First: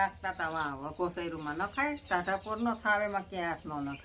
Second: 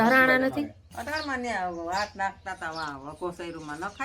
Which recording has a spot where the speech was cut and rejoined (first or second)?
second